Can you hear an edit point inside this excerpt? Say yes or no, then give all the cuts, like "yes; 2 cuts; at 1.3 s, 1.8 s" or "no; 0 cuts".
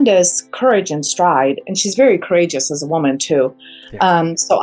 no; 0 cuts